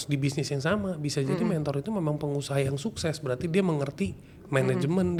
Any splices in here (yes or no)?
no